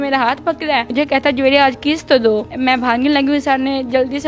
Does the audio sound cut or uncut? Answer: cut